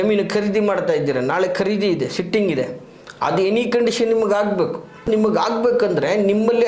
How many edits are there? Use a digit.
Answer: 1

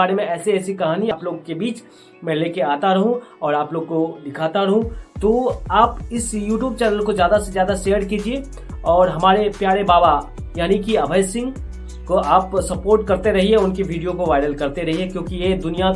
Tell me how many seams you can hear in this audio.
1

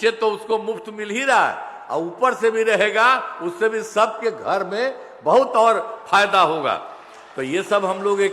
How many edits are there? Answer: 0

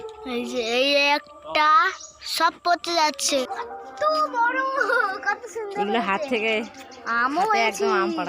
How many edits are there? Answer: 1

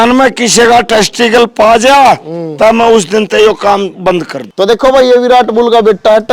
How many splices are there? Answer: 1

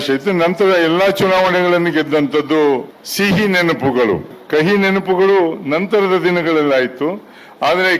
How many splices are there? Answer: 2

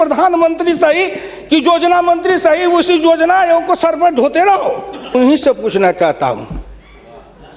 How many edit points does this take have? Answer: 1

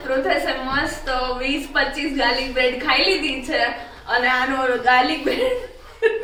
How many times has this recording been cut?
0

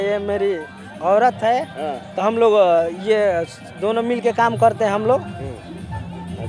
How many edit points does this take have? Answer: 0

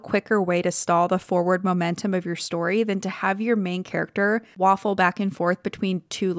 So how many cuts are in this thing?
0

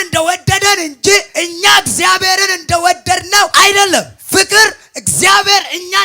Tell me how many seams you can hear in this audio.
3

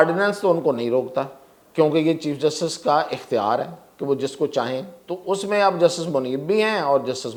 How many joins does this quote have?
0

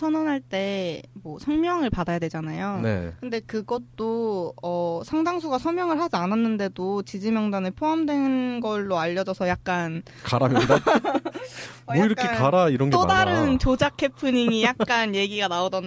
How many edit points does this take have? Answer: 1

